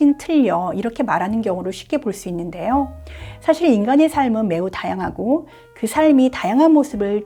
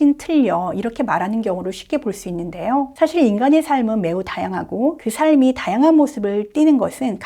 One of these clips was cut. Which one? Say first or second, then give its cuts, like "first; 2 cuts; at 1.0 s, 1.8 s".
second; 2 cuts; at 2.9 s, 5.0 s